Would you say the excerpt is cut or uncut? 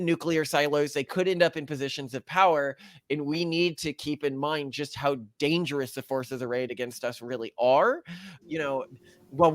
cut